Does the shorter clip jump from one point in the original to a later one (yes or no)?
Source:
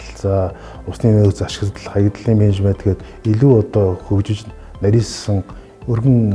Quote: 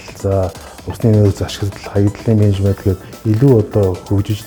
no